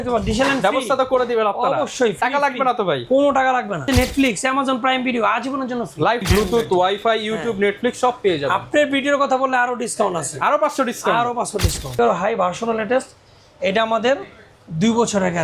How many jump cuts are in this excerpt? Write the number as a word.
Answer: three